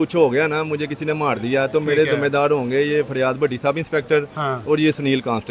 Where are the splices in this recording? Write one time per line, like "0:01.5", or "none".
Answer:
none